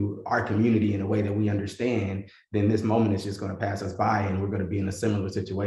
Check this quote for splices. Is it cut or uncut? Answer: uncut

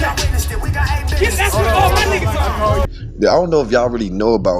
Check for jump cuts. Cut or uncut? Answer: cut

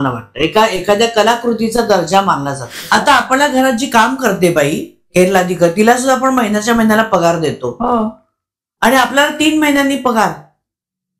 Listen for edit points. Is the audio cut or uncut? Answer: cut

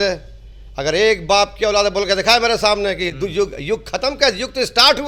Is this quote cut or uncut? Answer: uncut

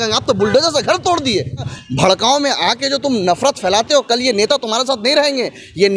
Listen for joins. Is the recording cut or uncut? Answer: cut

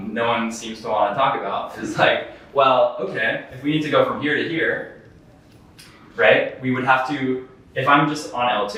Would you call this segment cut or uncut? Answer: uncut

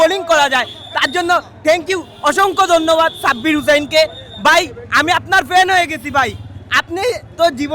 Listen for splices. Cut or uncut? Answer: uncut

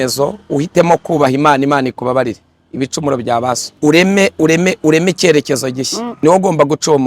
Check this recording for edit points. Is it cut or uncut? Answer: cut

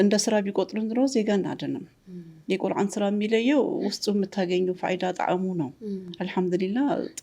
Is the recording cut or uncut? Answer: uncut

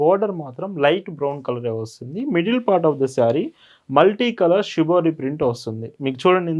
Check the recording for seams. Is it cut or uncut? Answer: uncut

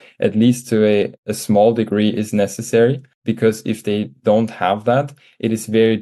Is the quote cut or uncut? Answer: cut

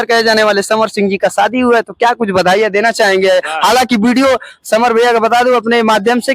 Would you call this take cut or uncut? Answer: uncut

